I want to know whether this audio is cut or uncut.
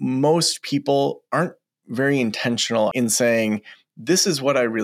cut